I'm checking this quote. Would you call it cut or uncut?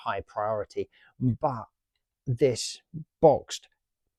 uncut